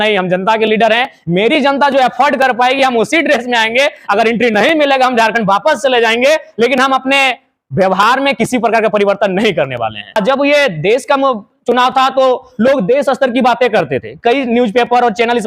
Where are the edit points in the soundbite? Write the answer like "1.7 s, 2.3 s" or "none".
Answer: 10.2 s